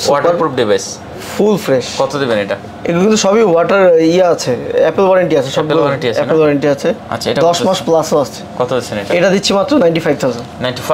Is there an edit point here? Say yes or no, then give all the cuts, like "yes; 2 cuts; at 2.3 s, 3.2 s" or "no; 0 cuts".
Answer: no; 0 cuts